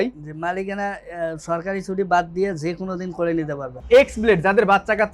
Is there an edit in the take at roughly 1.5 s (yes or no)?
no